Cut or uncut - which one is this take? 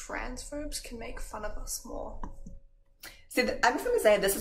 uncut